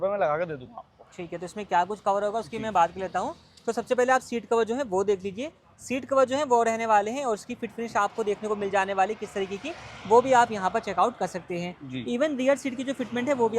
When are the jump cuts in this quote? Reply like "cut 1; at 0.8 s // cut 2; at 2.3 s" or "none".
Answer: none